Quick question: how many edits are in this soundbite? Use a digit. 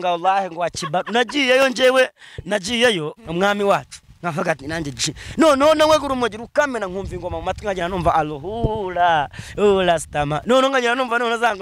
1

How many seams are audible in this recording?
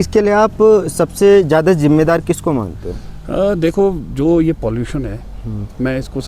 0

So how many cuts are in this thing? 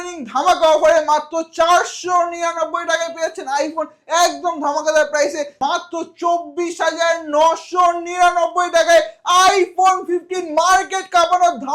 1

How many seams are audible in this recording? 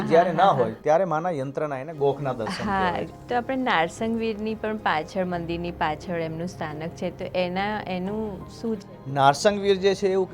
1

